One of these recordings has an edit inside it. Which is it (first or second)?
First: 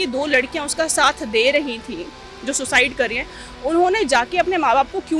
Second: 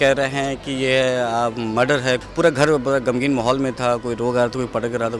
second